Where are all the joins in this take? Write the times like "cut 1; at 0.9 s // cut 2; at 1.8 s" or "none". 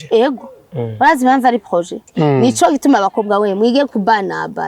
cut 1; at 2.0 s